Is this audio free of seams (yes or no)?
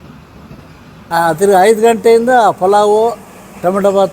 no